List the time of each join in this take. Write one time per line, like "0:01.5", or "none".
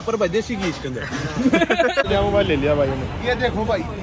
0:02.1